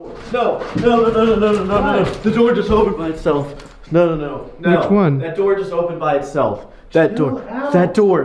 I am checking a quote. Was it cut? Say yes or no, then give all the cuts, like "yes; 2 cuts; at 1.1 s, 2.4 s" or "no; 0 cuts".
no; 0 cuts